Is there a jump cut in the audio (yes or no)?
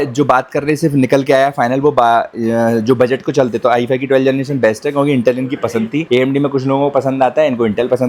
no